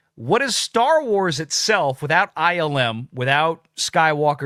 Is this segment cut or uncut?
uncut